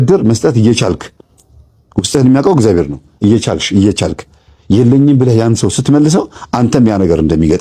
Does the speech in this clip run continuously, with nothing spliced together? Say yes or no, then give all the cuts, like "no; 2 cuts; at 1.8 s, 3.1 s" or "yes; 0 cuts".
yes; 0 cuts